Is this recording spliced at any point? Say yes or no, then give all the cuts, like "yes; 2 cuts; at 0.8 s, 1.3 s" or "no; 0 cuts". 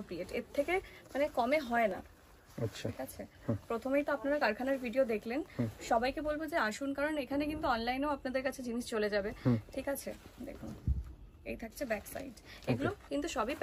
no; 0 cuts